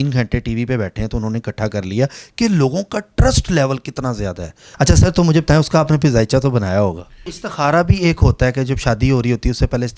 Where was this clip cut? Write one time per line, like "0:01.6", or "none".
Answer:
0:04.6
0:07.4